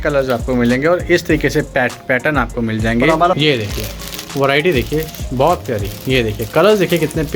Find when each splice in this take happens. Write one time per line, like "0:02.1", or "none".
0:03.4